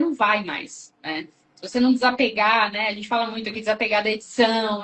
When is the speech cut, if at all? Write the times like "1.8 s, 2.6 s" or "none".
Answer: none